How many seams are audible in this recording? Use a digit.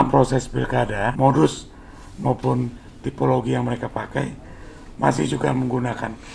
1